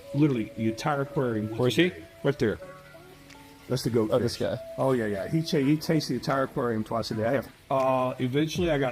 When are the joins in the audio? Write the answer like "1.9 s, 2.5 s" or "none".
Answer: 7.5 s